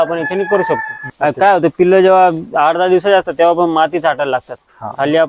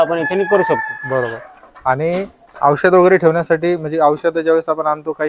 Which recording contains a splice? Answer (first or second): first